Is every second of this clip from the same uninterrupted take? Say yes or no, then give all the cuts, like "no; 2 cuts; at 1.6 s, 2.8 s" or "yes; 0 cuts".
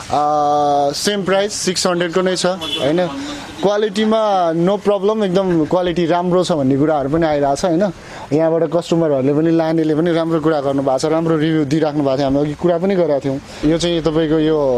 no; 1 cut; at 13.5 s